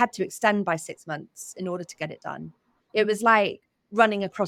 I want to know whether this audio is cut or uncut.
cut